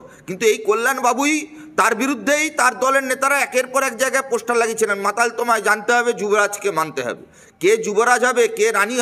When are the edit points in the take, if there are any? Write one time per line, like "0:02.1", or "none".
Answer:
none